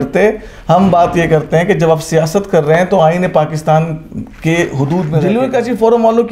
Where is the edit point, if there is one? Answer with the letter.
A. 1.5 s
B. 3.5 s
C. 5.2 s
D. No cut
C